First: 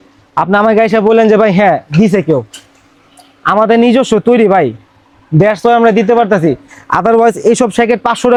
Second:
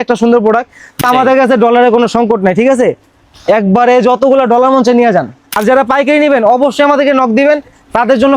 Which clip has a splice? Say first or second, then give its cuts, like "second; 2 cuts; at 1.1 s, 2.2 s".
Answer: second; 2 cuts; at 1.0 s, 5.4 s